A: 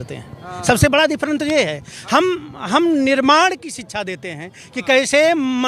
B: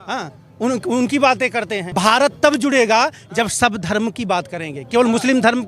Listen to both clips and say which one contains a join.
B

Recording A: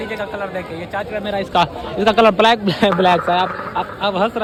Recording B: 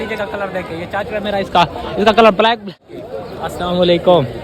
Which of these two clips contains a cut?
B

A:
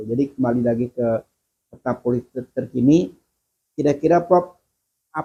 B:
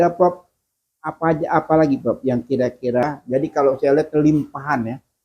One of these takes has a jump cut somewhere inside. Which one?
B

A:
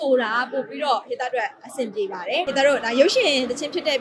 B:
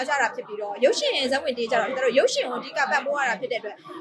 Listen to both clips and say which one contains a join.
A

